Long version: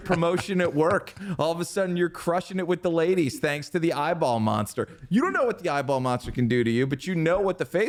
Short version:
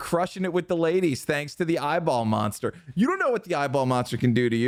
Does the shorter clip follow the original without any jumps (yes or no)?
yes